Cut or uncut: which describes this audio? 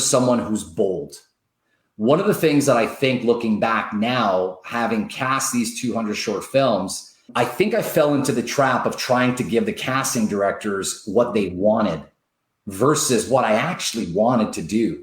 cut